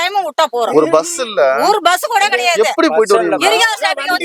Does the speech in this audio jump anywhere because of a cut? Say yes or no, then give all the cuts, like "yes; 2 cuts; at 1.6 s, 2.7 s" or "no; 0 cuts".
no; 0 cuts